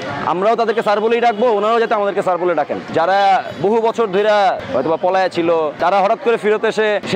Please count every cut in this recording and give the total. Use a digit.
2